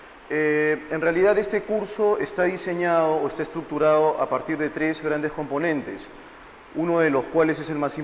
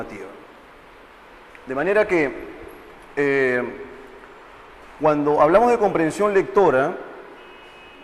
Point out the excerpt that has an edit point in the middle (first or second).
second